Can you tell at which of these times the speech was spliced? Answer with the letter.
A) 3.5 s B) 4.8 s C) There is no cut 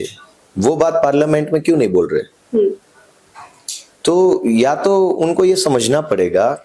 C